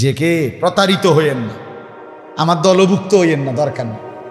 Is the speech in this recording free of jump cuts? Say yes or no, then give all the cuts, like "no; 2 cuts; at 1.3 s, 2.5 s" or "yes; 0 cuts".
yes; 0 cuts